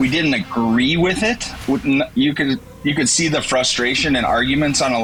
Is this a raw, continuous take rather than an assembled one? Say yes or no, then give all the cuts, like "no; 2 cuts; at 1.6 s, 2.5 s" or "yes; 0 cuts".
yes; 0 cuts